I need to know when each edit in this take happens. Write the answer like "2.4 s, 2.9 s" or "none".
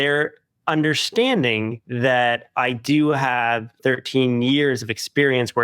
3.7 s